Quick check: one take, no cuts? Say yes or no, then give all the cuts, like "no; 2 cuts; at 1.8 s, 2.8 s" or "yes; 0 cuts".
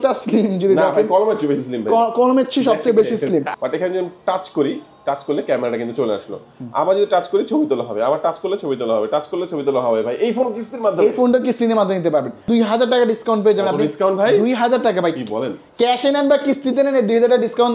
no; 2 cuts; at 3.5 s, 12.4 s